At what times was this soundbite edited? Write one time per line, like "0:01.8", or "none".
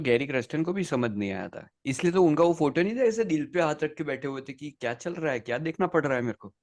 none